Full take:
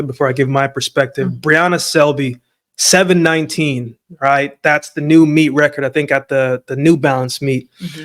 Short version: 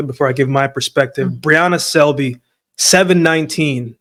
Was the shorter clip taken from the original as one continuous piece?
yes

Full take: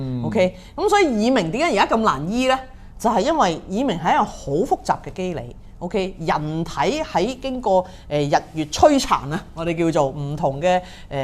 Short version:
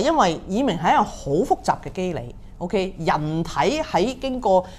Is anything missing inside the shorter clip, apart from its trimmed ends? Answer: no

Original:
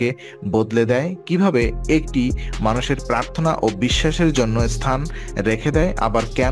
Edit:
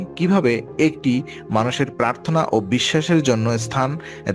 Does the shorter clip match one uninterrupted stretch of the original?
yes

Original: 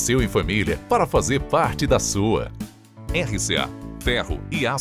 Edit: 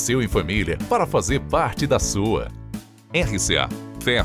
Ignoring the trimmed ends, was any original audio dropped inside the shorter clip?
no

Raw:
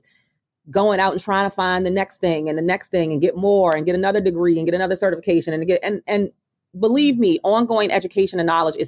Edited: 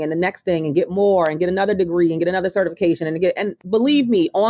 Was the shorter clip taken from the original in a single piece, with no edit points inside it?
no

